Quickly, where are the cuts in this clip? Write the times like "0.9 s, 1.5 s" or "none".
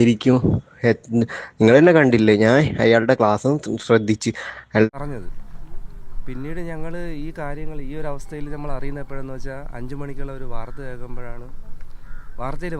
4.9 s

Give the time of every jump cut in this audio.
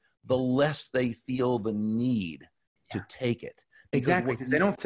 none

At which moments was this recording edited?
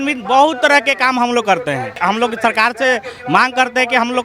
2.0 s

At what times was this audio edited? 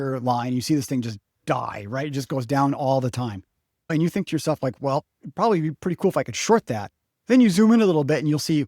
3.9 s

